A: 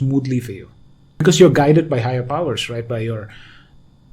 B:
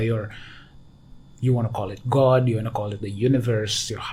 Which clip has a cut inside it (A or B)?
A